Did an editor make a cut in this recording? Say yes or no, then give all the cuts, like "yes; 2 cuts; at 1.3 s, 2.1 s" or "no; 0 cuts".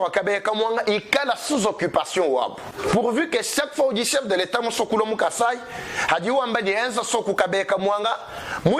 yes; 1 cut; at 2.7 s